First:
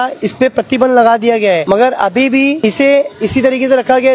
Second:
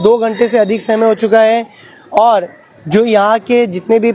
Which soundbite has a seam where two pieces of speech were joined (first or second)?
first